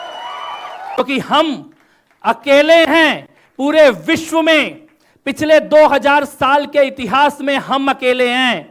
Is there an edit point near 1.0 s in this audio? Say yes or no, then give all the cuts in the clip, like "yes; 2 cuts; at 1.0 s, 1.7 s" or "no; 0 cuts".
yes; 1 cut; at 1.0 s